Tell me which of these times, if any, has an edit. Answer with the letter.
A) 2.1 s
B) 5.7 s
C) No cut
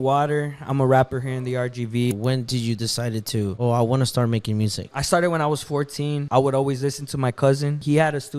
A